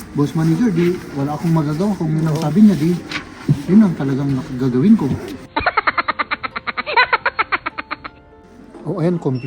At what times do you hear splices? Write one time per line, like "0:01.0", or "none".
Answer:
0:05.4
0:08.5